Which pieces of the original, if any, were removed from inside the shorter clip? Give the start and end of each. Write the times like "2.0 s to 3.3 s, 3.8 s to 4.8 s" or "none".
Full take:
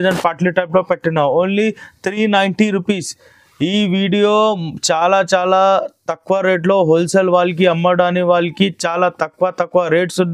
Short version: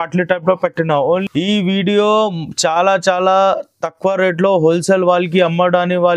1.5 s to 3.5 s